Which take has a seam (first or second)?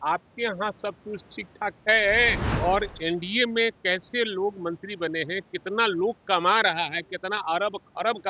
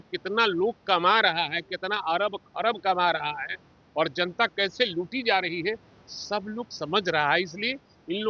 first